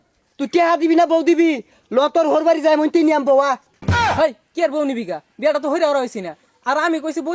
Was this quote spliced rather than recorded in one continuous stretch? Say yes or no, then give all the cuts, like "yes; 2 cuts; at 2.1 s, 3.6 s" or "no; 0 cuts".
no; 0 cuts